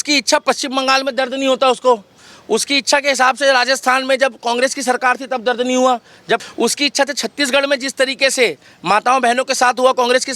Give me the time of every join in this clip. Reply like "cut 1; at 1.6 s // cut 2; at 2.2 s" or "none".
cut 1; at 6.4 s